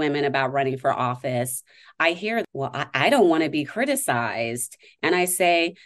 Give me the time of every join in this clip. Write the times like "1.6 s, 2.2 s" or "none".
2.4 s